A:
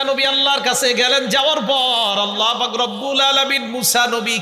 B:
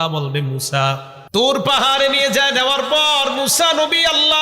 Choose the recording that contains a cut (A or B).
B